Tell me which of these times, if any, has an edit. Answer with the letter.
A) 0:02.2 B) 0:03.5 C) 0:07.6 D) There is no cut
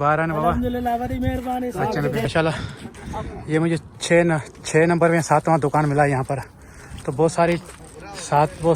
A